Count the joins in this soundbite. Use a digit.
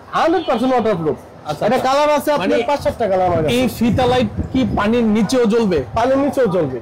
0